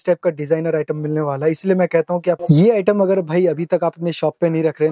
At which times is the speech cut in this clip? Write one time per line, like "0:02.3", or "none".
0:02.4